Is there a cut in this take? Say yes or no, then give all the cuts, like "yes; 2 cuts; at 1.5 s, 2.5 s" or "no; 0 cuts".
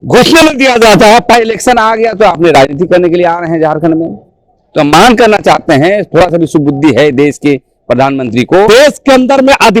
yes; 2 cuts; at 1.3 s, 8.7 s